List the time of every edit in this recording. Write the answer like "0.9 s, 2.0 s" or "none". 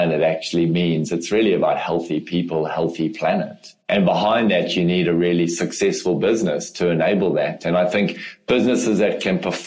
3.8 s